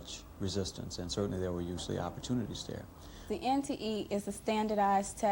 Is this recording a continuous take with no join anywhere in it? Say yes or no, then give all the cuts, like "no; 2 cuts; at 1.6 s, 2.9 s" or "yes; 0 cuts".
no; 1 cut; at 3.3 s